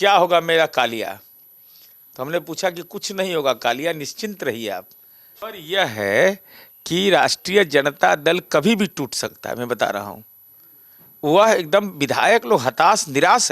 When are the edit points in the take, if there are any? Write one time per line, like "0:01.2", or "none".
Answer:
0:05.4